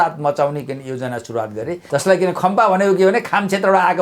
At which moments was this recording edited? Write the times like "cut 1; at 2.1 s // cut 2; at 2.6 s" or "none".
cut 1; at 1.8 s